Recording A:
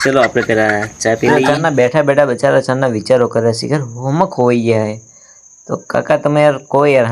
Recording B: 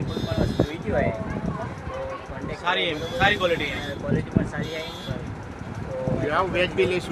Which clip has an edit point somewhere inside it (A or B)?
A